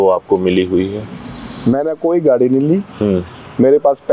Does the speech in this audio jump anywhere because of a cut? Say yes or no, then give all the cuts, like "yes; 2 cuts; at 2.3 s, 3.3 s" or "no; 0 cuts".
no; 0 cuts